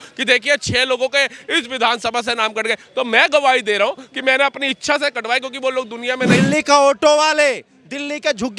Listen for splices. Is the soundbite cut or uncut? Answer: cut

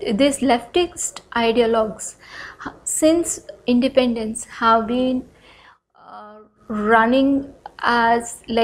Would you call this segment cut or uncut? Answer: uncut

